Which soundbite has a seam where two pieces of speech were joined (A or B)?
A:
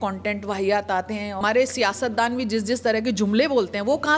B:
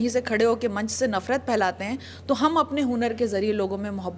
A